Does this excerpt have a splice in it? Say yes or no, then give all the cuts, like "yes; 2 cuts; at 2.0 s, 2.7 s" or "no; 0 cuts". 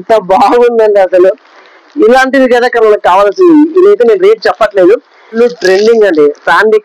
yes; 1 cut; at 5.4 s